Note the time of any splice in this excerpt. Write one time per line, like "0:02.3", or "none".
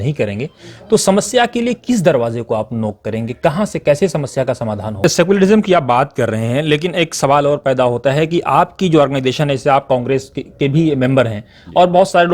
0:05.0